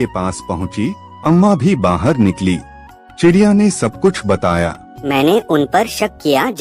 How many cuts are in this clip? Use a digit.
2